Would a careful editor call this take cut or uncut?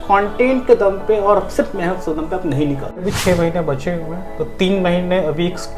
cut